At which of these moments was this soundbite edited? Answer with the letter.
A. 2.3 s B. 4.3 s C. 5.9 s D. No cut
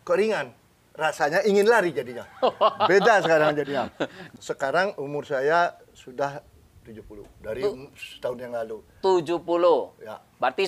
B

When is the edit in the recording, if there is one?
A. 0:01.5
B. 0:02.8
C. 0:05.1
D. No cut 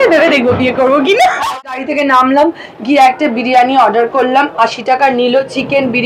A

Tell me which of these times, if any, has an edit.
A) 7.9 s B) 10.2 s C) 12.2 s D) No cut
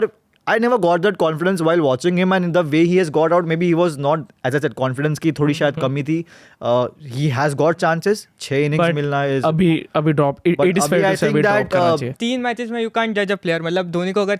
C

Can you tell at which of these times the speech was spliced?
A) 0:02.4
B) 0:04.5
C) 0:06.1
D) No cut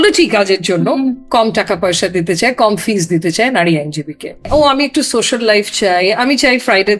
B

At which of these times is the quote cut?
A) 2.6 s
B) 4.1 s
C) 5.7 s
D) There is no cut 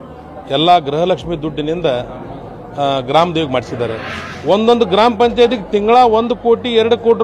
B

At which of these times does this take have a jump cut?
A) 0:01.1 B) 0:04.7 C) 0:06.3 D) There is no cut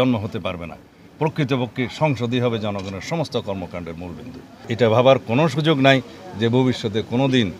B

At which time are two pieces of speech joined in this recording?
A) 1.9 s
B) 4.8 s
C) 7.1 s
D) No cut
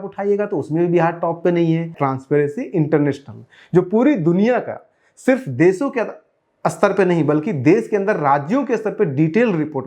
A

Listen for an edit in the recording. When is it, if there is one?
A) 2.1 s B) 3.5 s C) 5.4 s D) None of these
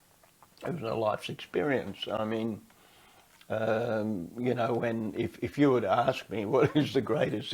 D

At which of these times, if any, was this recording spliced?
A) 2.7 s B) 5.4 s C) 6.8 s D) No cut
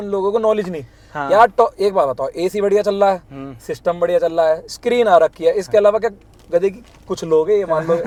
D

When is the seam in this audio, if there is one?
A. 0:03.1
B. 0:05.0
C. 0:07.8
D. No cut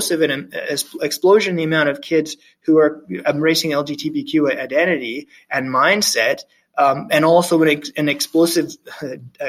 D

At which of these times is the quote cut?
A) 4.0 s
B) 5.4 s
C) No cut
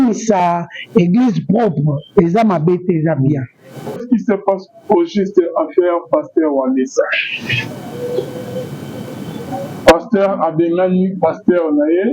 A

